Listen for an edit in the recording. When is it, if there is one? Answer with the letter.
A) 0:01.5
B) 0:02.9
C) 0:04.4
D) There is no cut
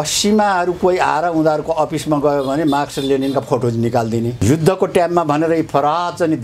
C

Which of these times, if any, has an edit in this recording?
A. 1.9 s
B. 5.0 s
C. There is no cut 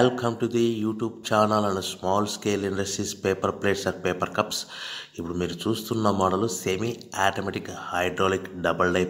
C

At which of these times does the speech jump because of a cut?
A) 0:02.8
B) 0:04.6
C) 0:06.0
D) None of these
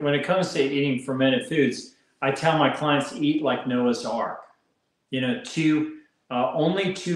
D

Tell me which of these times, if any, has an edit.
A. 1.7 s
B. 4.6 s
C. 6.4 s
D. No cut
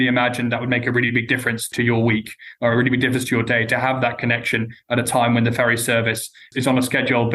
A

